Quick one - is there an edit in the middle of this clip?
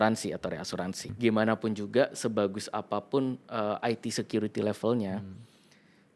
yes; 1 cut; at 1.1 s

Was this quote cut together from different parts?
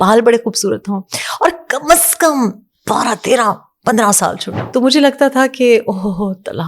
yes; 1 cut; at 4.5 s

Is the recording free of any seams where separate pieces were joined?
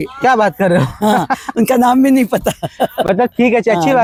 yes; 0 cuts

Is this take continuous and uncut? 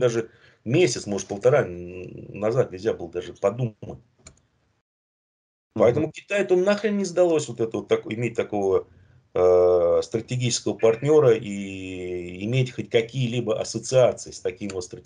yes; 0 cuts

